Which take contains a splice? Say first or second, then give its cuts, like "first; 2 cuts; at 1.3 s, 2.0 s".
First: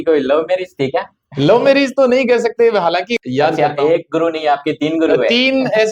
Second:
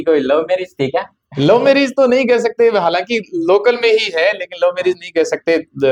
first; 1 cut; at 3.2 s